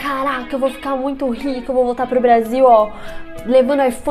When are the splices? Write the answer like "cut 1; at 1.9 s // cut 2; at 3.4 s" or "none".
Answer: none